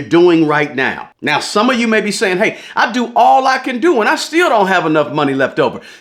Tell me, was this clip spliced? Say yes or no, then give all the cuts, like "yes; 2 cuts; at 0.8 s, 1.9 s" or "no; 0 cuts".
no; 0 cuts